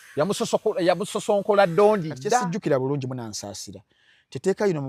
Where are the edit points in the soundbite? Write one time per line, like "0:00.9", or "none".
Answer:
0:02.1